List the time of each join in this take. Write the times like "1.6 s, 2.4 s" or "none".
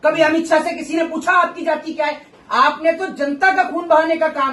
2.3 s